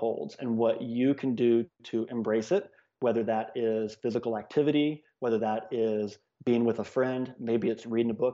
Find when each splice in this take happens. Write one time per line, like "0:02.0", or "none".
0:01.8